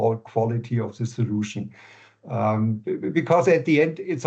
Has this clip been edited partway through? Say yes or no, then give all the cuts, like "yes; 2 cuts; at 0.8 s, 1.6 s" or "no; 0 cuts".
no; 0 cuts